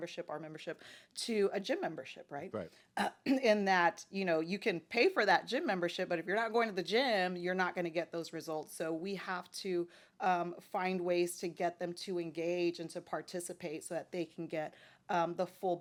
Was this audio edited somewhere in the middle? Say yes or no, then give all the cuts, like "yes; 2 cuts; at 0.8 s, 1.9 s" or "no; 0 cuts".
no; 0 cuts